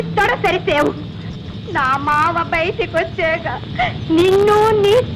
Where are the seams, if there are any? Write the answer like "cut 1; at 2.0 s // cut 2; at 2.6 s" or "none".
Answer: none